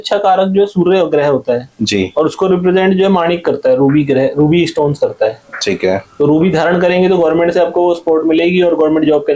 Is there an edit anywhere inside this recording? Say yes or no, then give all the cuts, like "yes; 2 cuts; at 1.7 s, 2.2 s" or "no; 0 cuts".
no; 0 cuts